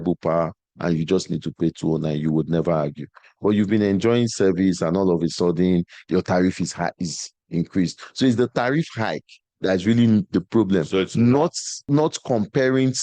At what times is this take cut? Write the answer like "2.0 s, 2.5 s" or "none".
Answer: 11.9 s